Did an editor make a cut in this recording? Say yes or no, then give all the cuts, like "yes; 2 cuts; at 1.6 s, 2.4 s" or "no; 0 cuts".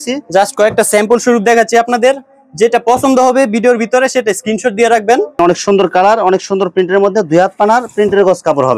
yes; 1 cut; at 5.4 s